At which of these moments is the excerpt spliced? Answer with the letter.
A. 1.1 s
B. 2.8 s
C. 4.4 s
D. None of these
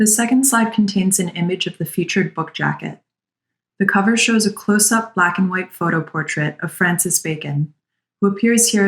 A